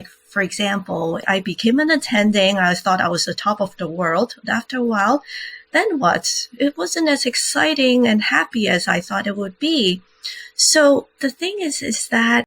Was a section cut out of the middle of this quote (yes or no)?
yes